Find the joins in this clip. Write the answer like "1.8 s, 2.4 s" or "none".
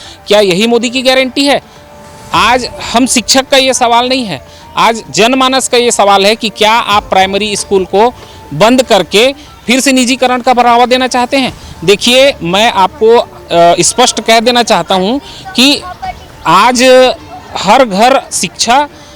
none